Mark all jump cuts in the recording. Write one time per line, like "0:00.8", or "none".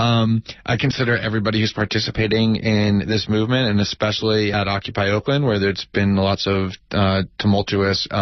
none